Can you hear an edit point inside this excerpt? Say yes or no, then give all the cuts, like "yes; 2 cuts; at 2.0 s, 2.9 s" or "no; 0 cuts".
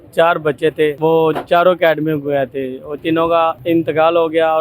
yes; 2 cuts; at 1.0 s, 3.0 s